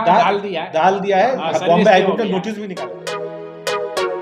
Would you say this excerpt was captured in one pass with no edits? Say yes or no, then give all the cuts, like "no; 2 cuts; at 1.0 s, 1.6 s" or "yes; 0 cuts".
no; 1 cut; at 2.7 s